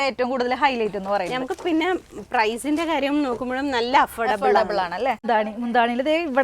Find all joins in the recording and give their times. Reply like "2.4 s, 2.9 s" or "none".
5.2 s